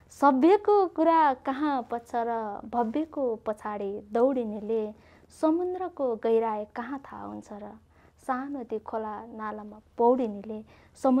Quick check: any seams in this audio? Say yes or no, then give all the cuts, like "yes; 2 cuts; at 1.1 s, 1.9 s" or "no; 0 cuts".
no; 0 cuts